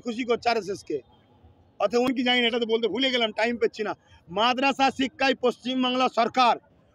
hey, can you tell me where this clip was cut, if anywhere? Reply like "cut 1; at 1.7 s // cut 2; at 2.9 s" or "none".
cut 1; at 2.1 s